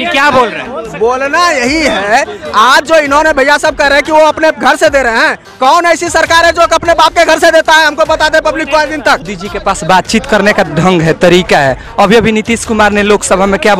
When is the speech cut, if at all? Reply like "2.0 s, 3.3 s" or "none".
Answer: 9.3 s